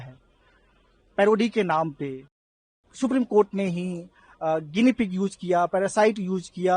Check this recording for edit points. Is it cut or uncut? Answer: cut